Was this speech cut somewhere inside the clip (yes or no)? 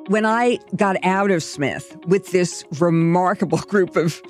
no